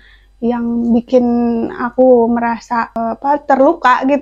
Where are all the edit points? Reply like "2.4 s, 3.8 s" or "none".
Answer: none

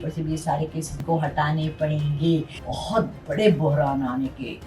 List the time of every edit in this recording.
1.0 s, 2.6 s

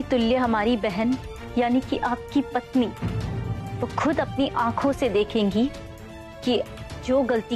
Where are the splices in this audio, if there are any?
1.3 s

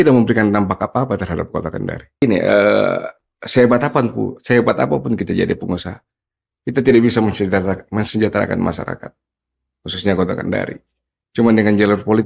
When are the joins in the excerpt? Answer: 2.2 s

